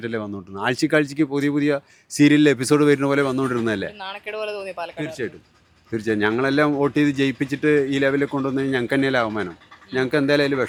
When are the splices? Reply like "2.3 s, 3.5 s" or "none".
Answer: none